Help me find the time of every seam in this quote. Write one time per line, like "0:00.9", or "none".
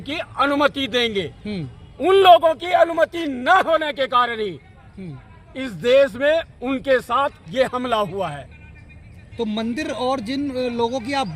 none